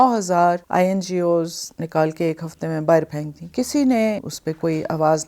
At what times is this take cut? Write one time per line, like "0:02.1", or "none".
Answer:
0:04.2